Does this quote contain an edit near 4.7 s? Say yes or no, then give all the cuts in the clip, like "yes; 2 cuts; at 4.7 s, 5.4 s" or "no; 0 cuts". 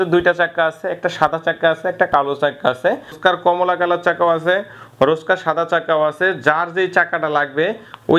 no; 1 cut; at 3.2 s